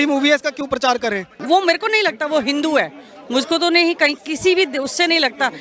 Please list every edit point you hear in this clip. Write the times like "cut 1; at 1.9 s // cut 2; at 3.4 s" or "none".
cut 1; at 1.3 s